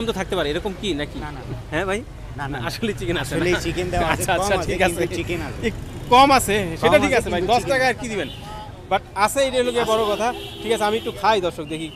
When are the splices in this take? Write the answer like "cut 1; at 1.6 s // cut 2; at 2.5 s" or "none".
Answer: none